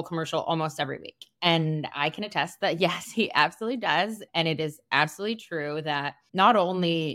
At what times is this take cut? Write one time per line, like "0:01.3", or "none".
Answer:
0:04.2